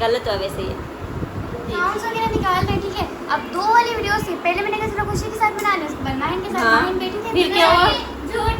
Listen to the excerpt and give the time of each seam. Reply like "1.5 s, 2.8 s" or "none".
1.8 s